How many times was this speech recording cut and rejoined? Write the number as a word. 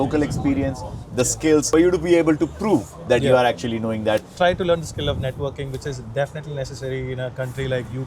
two